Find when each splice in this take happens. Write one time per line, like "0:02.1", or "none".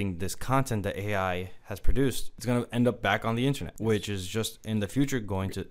0:02.3
0:03.7